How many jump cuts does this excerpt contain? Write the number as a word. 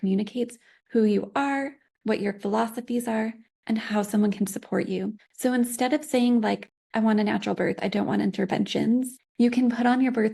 three